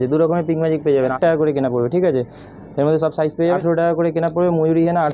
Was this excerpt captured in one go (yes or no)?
no